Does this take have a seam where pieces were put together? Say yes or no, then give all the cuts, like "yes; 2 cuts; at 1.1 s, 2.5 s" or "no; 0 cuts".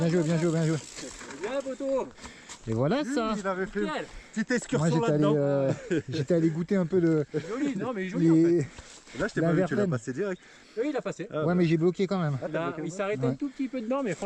no; 0 cuts